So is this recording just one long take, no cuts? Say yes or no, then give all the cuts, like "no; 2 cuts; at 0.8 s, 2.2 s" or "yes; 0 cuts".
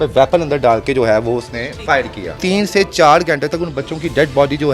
no; 1 cut; at 2.4 s